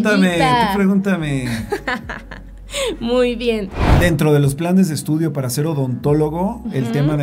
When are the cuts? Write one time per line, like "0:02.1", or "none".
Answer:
0:03.9